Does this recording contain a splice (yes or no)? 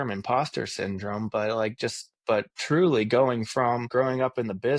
yes